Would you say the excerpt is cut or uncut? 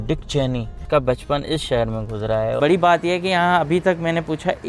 cut